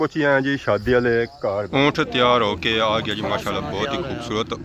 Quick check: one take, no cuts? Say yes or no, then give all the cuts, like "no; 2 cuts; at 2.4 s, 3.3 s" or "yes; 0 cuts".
no; 1 cut; at 1.7 s